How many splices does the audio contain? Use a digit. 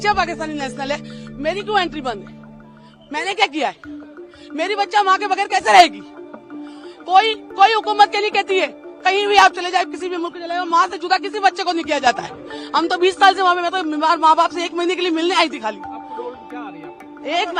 0